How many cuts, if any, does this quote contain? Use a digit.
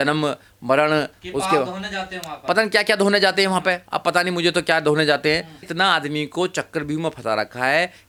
0